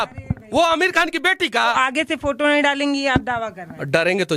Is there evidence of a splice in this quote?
yes; 1 cut; at 1.7 s

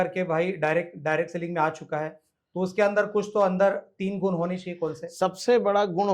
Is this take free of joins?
yes; 0 cuts

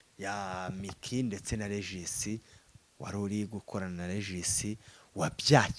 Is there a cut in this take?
no; 0 cuts

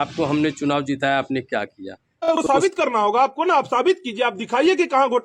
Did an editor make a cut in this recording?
yes; 1 cut; at 2.4 s

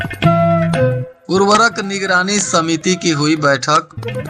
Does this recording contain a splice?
yes; 1 cut; at 1.1 s

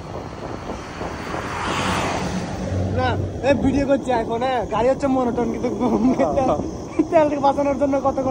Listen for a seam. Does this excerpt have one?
no; 0 cuts

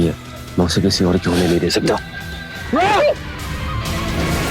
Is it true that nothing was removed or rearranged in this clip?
yes; 0 cuts

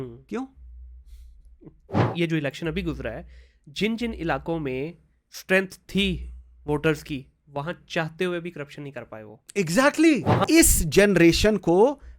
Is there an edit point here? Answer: yes; 2 cuts; at 2.0 s, 10.4 s

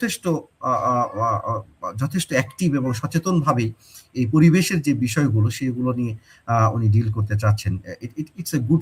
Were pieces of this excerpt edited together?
no; 0 cuts

